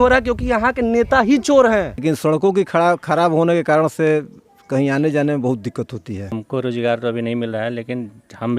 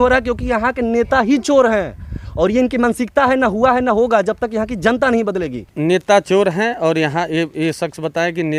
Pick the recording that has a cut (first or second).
first